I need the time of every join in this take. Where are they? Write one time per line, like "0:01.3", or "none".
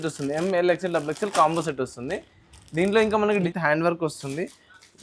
0:03.4